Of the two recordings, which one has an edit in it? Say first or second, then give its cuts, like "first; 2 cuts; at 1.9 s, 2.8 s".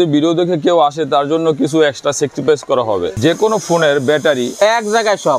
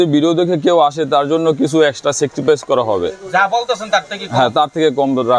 first; 1 cut; at 3.1 s